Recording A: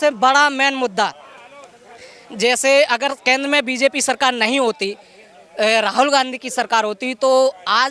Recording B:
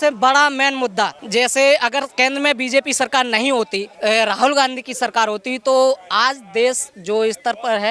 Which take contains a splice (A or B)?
B